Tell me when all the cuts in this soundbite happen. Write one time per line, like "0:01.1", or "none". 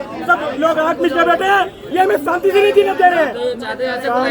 0:01.8